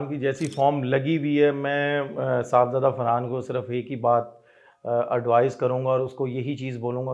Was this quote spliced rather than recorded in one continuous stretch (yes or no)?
no